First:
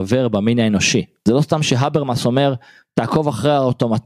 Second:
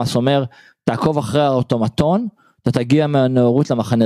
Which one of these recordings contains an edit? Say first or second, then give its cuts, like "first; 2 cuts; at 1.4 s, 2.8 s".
first; 1 cut; at 1.1 s